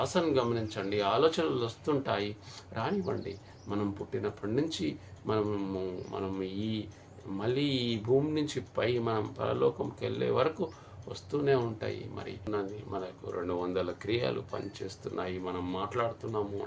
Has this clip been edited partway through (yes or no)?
yes